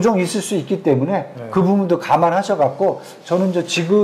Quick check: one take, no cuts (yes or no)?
yes